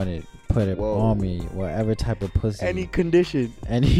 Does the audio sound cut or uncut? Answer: uncut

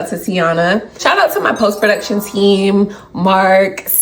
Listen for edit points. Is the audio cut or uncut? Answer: cut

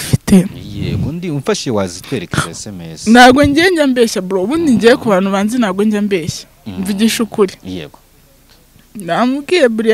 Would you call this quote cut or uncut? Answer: uncut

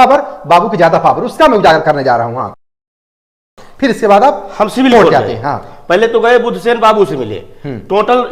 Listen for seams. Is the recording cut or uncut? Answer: uncut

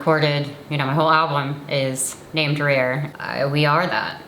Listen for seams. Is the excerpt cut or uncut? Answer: cut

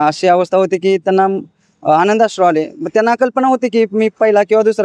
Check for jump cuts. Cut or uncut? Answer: uncut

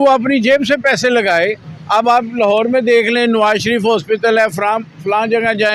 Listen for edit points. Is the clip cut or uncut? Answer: uncut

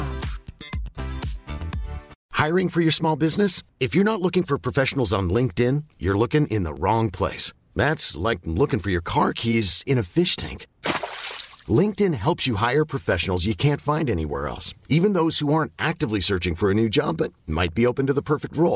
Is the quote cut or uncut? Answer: cut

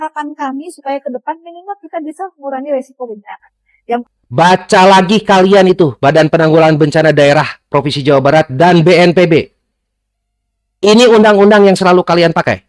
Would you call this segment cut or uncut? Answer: cut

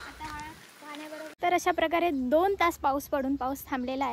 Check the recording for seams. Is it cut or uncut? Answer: cut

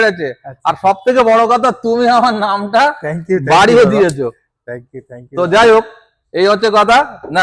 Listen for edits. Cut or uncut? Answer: uncut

